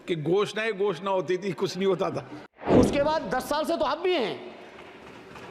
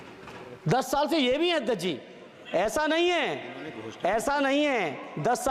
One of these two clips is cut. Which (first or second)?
first